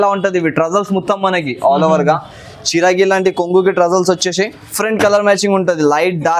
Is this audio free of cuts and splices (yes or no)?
no